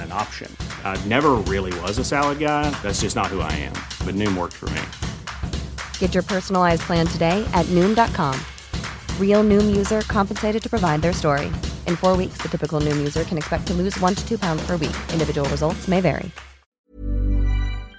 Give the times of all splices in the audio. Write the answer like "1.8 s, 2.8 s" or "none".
16.8 s